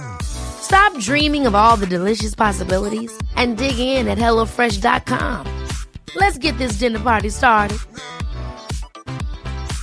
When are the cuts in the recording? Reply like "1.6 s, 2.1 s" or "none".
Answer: none